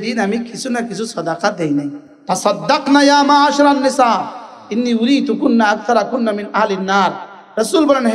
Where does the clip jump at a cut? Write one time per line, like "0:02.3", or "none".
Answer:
0:02.0